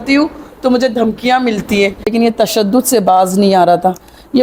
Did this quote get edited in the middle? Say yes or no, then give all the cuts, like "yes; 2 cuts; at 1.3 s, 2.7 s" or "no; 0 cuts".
yes; 1 cut; at 2.1 s